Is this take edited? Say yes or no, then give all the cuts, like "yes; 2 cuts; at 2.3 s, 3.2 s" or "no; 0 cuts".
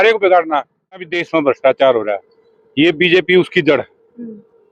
yes; 1 cut; at 1.1 s